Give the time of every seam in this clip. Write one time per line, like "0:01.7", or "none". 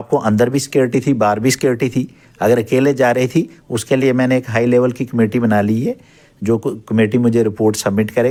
none